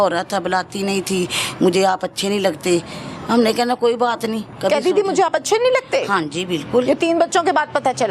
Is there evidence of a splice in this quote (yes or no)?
yes